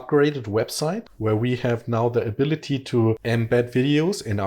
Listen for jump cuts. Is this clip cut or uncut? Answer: cut